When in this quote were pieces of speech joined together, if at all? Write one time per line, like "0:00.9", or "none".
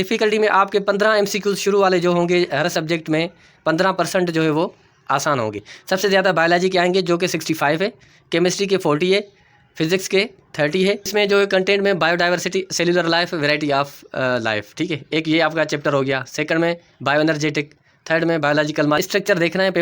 0:05.7
0:11.1
0:19.0